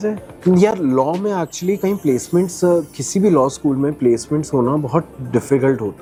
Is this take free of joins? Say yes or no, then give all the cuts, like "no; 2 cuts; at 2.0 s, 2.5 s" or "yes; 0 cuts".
yes; 0 cuts